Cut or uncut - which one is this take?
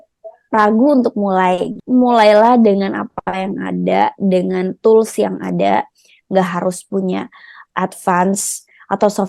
cut